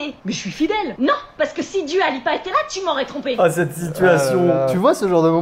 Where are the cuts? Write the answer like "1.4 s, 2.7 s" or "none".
3.3 s